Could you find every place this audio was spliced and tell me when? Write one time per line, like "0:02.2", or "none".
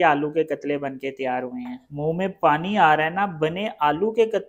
0:01.8